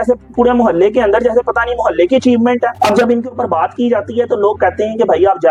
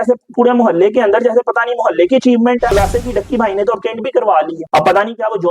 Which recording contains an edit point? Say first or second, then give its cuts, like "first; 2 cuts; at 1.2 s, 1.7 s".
second; 1 cut; at 2.7 s